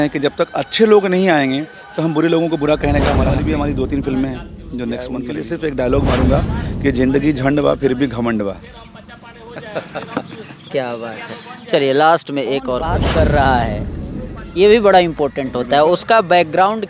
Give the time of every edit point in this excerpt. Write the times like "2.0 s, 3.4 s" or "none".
3.4 s, 5.3 s, 13.0 s